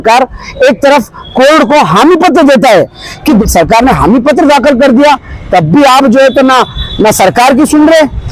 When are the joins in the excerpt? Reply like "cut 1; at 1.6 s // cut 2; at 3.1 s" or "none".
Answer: cut 1; at 3.4 s